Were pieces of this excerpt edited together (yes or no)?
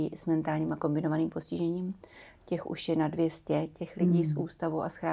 no